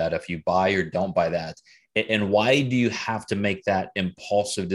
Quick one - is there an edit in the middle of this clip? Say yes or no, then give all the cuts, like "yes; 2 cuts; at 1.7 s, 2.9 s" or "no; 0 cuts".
no; 0 cuts